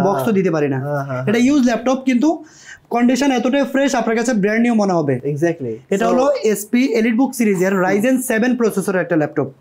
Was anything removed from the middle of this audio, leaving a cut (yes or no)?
no